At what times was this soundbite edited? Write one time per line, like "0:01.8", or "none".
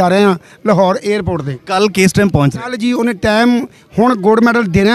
none